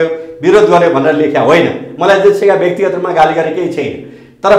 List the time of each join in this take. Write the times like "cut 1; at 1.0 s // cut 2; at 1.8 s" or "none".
none